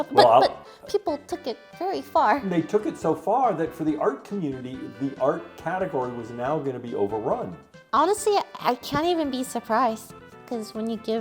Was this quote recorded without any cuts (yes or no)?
no